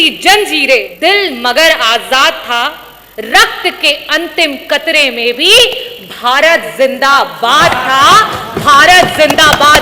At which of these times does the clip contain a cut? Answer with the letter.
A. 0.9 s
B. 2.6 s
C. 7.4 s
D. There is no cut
A